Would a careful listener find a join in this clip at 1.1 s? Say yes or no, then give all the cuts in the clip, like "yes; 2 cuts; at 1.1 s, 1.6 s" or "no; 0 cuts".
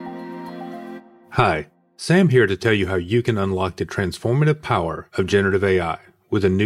yes; 1 cut; at 1.1 s